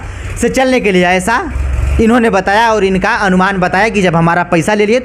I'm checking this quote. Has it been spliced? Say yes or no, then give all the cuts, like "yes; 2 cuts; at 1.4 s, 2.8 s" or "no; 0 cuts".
no; 0 cuts